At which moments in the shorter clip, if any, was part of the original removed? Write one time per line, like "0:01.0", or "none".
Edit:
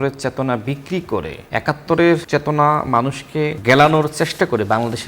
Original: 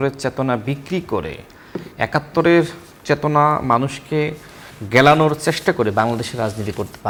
0:01.4
0:02.2
0:03.6

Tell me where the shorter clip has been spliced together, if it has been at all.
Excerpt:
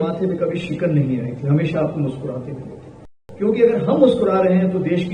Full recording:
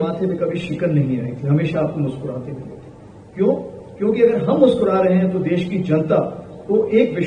0:03.2

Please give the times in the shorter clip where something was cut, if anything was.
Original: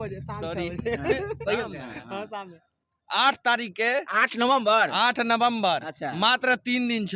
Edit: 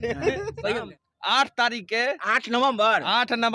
0:01.0

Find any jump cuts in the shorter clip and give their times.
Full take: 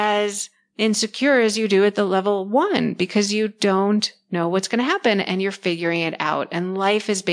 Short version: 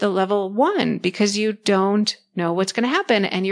none

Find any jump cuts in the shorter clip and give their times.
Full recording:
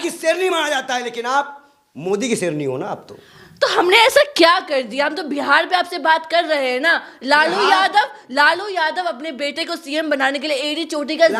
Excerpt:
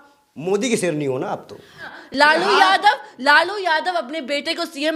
0:01.9

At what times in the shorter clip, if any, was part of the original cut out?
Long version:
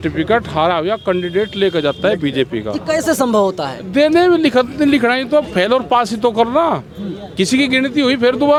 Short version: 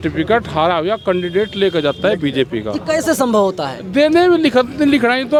none

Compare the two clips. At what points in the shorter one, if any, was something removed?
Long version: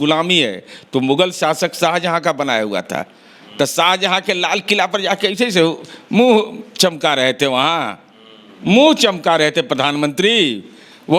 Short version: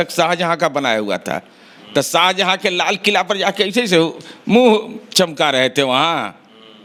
none

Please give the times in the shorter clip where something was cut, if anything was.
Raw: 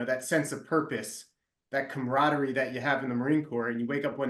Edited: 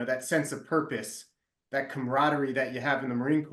none

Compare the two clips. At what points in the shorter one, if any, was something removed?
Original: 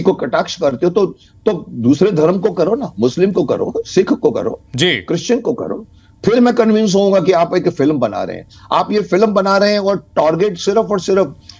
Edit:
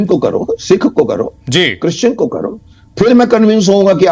none

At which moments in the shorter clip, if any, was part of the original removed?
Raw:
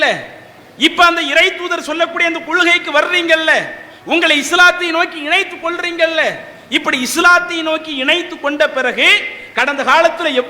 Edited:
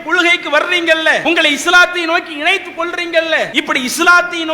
0:01.2
0:03.5

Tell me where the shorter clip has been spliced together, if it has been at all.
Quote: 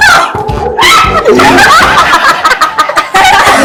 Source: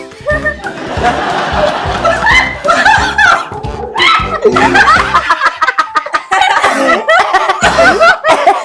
none

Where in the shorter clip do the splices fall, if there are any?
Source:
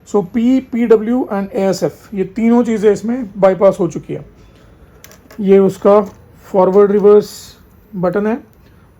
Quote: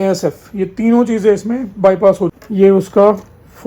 0:02.4

